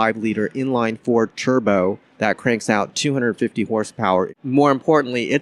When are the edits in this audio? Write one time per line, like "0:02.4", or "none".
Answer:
0:02.1
0:04.3